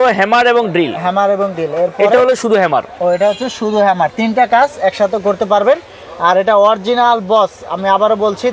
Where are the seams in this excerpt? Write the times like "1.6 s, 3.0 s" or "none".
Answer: none